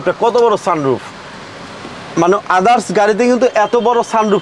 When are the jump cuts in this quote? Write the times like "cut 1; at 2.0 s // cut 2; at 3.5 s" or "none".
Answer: none